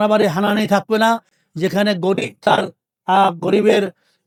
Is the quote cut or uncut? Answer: uncut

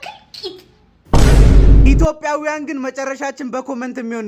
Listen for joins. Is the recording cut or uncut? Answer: cut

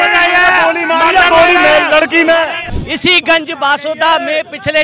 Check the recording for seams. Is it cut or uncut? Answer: cut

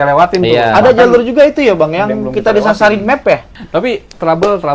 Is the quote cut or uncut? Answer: cut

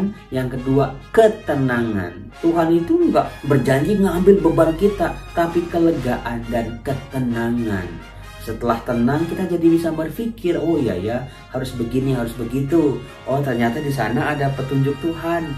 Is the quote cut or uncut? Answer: cut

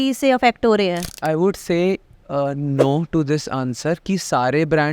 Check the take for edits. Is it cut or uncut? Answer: cut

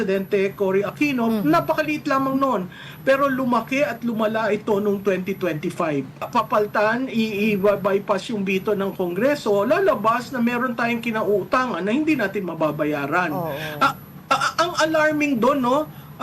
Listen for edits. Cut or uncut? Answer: cut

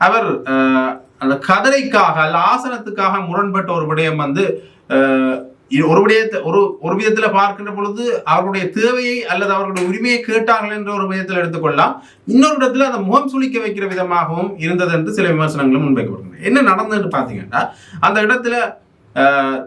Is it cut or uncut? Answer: uncut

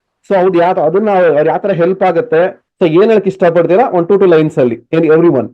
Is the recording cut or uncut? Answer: cut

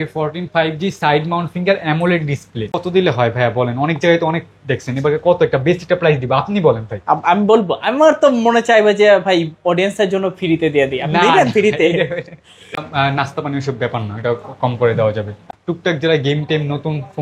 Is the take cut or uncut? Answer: cut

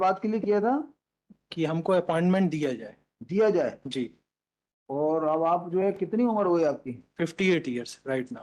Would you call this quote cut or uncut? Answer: uncut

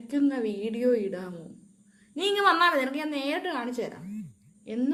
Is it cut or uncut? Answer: uncut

